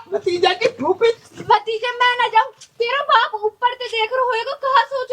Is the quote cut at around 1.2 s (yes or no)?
yes